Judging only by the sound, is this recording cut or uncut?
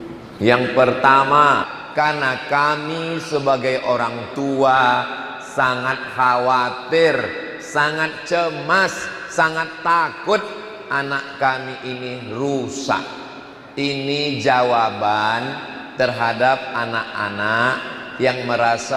cut